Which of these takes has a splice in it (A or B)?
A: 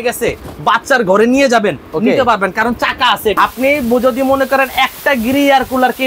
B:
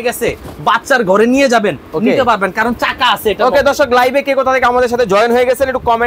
A